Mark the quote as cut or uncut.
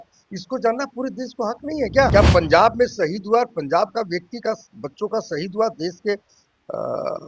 cut